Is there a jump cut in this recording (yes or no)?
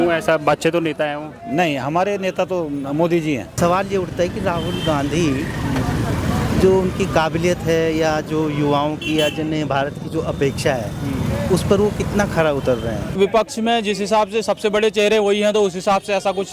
yes